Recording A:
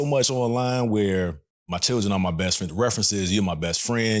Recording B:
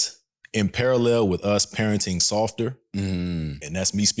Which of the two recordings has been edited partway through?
A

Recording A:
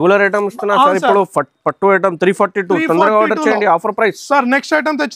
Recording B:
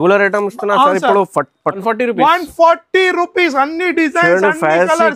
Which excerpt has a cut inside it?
B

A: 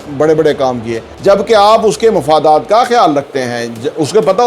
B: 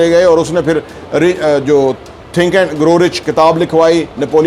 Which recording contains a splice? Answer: A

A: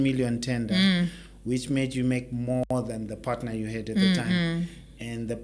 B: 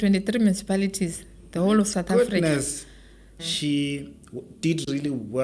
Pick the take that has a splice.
B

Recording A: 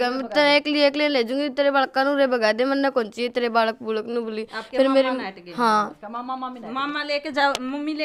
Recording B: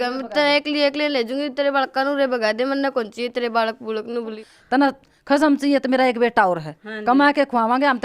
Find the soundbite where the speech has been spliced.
B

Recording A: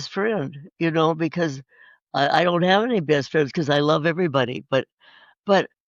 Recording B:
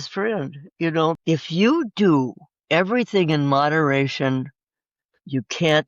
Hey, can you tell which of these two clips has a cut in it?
B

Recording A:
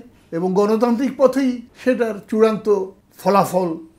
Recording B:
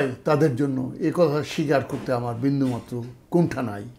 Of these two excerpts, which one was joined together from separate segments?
A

